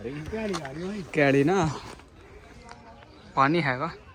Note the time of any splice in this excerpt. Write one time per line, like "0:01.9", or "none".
none